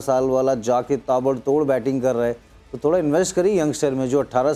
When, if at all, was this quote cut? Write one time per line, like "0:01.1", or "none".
none